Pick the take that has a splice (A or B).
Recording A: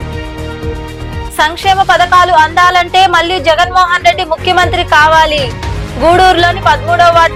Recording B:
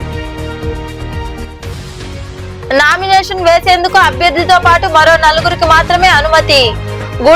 B